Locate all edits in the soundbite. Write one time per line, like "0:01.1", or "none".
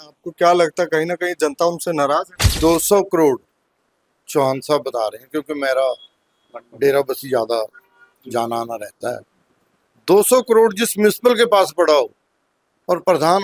0:02.4